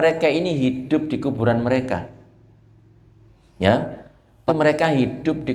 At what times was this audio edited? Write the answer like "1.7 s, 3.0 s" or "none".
4.4 s